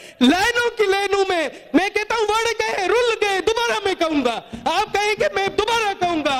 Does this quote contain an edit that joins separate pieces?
no; 0 cuts

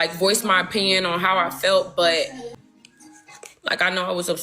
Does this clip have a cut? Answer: yes; 1 cut; at 2.6 s

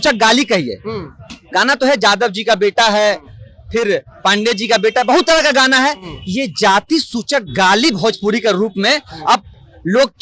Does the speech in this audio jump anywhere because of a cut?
no; 0 cuts

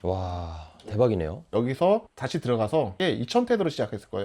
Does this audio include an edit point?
yes; 2 cuts; at 1.5 s, 3.0 s

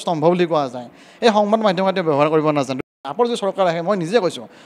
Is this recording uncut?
no; 1 cut; at 2.8 s

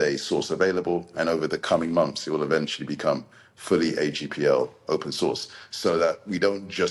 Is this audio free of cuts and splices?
yes; 0 cuts

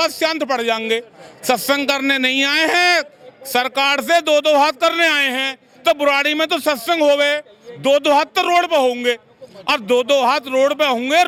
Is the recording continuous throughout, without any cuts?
yes; 0 cuts

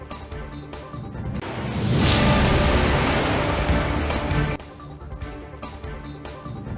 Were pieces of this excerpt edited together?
no; 0 cuts

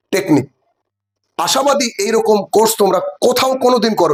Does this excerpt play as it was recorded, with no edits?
yes; 0 cuts

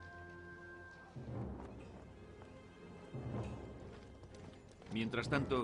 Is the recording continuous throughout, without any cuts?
no; 1 cut; at 2.2 s

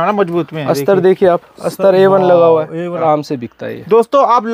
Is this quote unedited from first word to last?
no; 1 cut; at 3.0 s

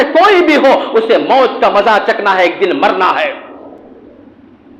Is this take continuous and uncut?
yes; 0 cuts

